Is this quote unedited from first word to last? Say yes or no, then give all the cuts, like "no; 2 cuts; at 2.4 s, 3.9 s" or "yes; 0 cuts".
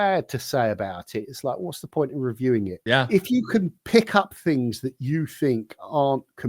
no; 1 cut; at 2.8 s